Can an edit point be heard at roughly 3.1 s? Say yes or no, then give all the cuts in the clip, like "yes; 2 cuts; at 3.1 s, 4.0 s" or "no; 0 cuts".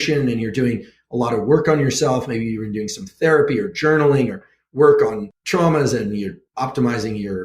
no; 2 cuts; at 5.3 s, 6.4 s